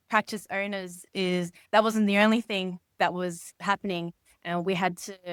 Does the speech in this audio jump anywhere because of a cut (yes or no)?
no